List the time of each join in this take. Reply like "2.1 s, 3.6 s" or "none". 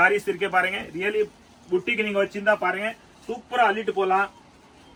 none

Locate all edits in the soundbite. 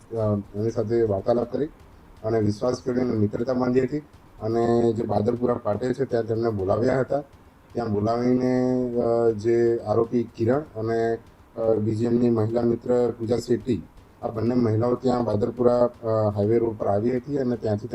none

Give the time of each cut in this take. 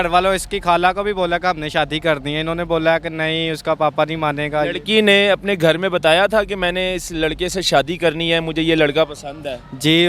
none

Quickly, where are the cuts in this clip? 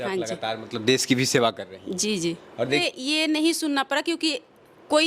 2.8 s

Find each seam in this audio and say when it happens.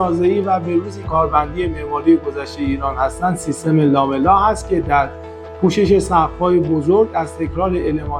1.1 s

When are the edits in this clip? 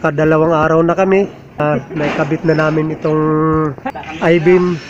1.6 s, 3.8 s

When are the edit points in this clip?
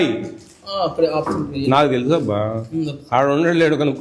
none

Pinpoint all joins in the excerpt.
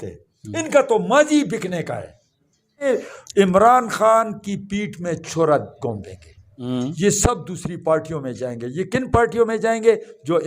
2.9 s, 6.6 s

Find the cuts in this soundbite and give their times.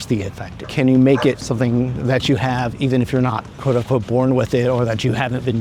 none

